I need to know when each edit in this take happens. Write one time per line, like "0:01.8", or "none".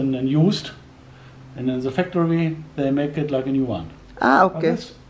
none